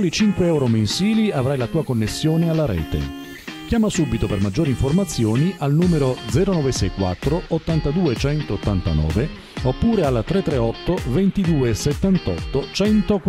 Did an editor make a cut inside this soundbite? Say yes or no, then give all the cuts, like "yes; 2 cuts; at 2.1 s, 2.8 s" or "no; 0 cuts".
no; 0 cuts